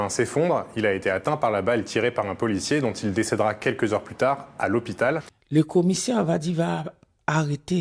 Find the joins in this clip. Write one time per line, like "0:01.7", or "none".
0:05.3